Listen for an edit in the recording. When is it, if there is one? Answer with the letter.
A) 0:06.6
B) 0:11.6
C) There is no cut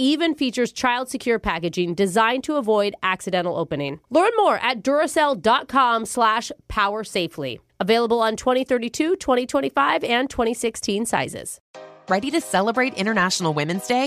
B